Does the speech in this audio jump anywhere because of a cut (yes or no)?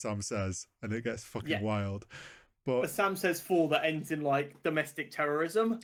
no